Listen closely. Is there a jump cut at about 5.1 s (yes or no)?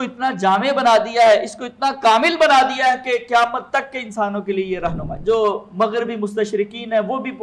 yes